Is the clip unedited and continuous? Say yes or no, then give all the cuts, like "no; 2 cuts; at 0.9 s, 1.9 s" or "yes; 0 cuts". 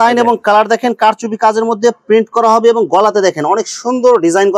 yes; 0 cuts